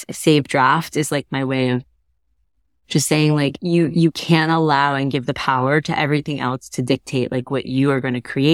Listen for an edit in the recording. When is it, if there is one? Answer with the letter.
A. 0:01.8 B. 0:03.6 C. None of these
B